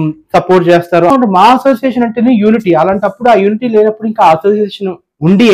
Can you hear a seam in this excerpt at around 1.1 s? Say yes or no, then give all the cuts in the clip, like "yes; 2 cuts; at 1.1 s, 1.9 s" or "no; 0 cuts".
yes; 1 cut; at 1.1 s